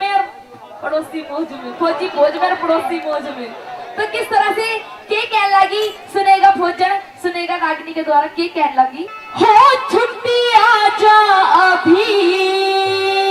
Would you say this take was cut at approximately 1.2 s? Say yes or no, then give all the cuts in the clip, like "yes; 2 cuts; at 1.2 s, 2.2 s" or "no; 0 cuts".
yes; 1 cut; at 1.2 s